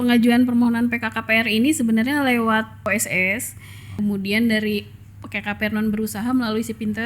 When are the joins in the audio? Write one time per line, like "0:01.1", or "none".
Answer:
0:02.9
0:04.0